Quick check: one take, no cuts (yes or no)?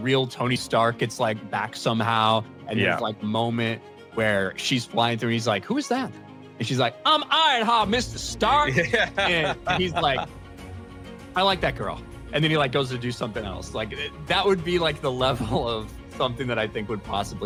yes